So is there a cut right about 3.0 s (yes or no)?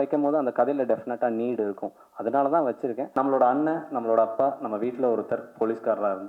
yes